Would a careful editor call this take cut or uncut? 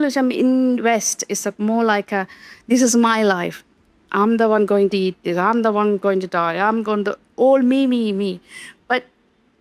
uncut